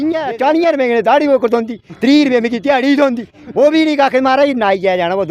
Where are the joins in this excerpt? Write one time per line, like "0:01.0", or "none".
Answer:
none